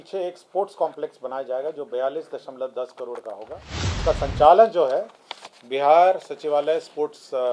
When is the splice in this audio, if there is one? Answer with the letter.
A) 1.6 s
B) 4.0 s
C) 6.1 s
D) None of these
B